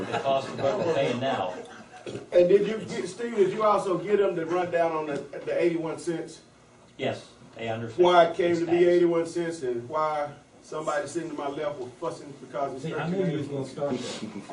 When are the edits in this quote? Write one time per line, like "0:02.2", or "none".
none

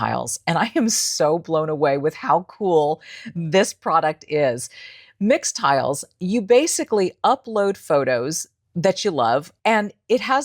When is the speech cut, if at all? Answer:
0:09.5

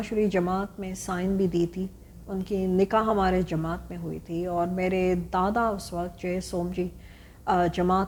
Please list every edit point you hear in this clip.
none

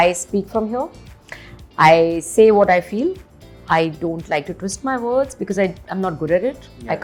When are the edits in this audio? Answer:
none

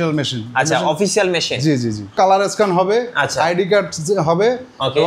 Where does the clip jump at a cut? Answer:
0:02.2

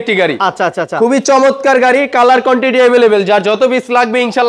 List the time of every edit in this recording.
none

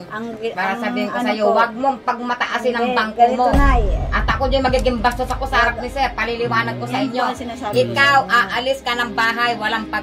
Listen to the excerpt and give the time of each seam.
none

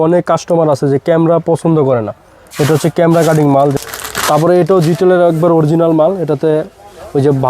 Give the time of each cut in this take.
0:03.8

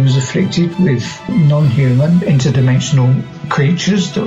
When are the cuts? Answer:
0:01.3

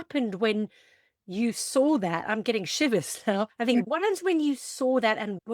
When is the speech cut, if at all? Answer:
0:03.8

